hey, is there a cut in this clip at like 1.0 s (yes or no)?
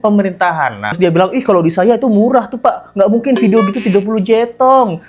yes